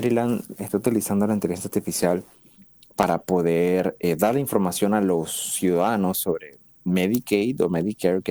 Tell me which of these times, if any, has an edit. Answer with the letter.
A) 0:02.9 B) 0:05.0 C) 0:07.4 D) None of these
D